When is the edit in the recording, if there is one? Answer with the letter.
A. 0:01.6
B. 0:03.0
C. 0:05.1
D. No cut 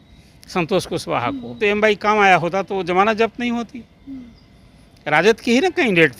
A